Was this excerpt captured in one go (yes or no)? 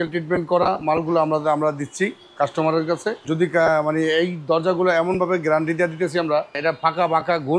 no